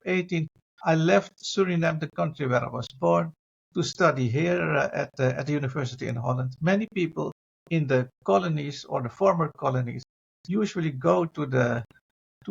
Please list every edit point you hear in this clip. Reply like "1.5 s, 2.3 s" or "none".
none